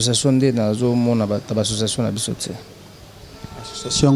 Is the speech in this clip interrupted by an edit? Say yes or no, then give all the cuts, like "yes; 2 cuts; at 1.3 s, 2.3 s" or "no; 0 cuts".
no; 0 cuts